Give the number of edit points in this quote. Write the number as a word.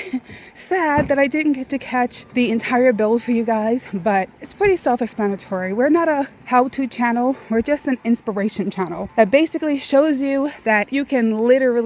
five